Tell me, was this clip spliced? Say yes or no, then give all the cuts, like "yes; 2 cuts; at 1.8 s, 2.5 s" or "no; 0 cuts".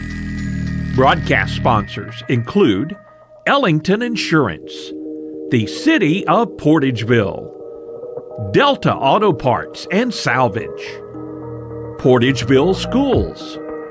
yes; 1 cut; at 0.9 s